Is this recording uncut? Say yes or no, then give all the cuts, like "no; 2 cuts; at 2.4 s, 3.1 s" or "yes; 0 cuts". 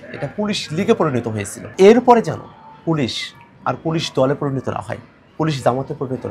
no; 1 cut; at 1.6 s